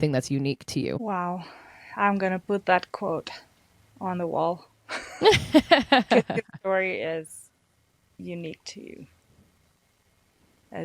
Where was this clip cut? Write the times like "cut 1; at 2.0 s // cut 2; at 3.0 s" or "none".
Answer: none